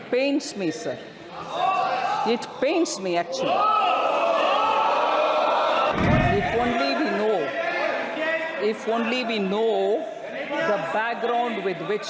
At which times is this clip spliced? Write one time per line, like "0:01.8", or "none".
0:05.9